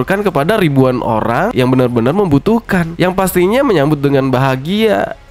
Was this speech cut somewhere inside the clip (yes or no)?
no